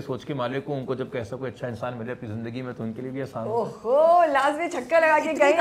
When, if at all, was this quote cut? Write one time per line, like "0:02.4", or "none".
none